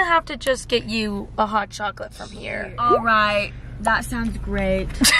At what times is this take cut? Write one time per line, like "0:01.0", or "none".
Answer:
none